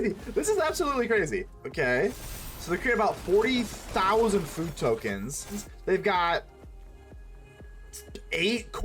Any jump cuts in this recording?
yes; 2 cuts; at 1.6 s, 5.6 s

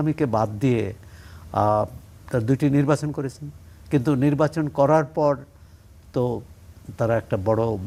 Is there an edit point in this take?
no; 0 cuts

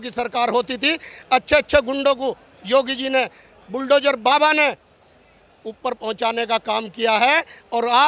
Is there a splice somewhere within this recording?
no; 0 cuts

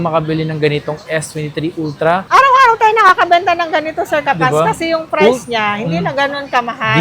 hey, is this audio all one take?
no; 1 cut; at 2.2 s

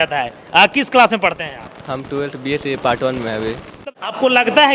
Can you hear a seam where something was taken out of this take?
yes; 1 cut; at 3.8 s

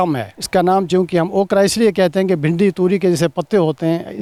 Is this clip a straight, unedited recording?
yes; 0 cuts

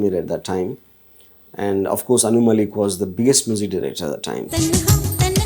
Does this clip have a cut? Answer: yes; 1 cut; at 4.5 s

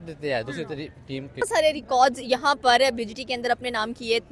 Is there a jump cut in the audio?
yes; 1 cut; at 1.5 s

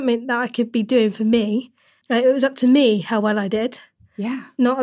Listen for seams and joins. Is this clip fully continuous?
yes; 0 cuts

